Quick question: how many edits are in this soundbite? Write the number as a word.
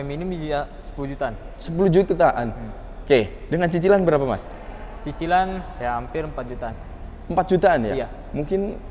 zero